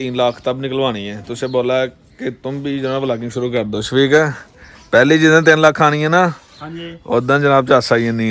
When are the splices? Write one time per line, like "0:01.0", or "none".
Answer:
none